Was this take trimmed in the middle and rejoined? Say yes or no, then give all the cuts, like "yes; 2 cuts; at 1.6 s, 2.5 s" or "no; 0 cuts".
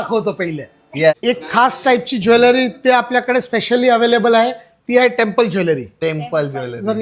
yes; 1 cut; at 1.1 s